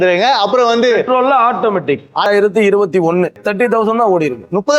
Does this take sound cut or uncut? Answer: cut